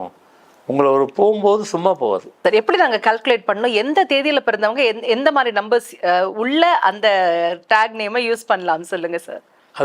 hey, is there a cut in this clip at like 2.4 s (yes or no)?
yes